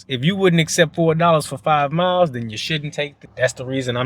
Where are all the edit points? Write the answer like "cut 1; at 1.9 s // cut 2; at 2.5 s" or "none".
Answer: none